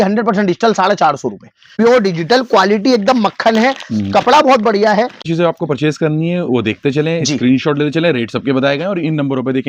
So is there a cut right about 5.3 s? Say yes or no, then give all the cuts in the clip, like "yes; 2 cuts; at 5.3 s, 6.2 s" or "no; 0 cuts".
yes; 2 cuts; at 1.6 s, 5.3 s